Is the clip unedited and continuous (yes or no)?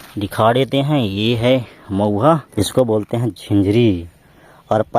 no